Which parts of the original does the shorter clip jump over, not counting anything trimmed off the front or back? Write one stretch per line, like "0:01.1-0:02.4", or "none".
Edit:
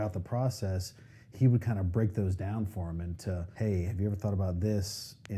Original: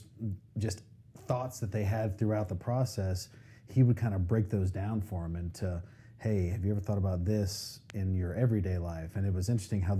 0:05.8-0:06.1

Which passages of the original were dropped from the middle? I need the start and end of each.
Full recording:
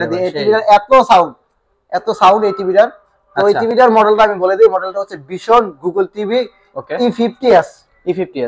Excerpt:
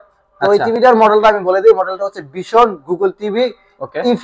none

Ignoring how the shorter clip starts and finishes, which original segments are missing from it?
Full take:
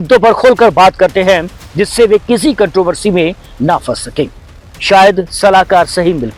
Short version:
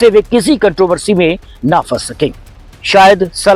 none

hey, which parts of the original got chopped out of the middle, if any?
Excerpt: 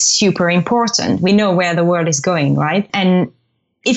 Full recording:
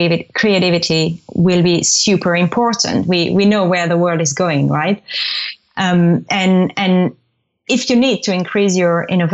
0:03.1-0:03.4
0:05.0-0:06.7

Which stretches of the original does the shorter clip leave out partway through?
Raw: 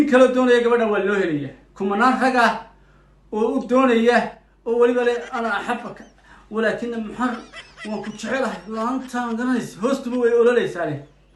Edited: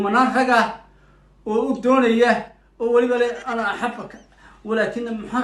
none

